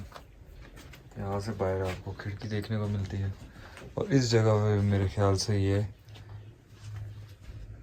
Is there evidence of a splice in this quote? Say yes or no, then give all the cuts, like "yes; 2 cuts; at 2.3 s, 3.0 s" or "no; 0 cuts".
no; 0 cuts